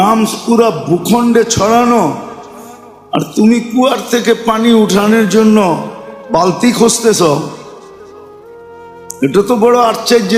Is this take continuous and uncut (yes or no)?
no